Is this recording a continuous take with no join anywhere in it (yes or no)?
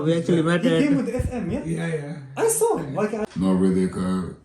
no